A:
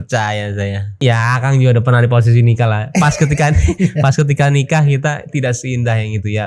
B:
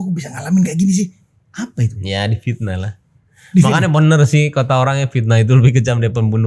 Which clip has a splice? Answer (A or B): A